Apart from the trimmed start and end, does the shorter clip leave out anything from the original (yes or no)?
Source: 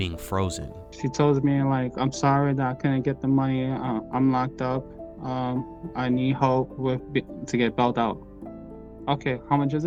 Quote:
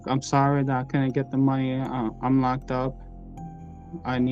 no